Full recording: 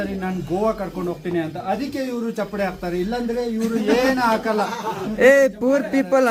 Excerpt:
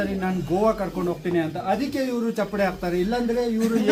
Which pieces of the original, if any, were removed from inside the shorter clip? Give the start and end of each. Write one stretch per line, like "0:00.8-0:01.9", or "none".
none